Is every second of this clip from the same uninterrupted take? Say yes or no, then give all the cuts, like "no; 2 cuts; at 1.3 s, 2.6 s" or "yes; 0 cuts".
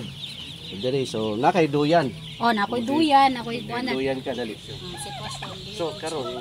no; 1 cut; at 4.6 s